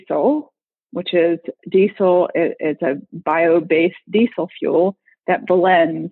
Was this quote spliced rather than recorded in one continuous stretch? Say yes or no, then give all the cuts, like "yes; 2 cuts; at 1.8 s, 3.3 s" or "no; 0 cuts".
no; 0 cuts